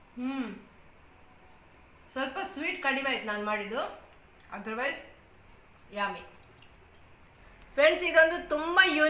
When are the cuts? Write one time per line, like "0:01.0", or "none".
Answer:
0:07.4